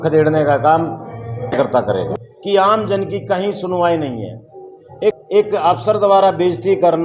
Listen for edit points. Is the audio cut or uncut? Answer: cut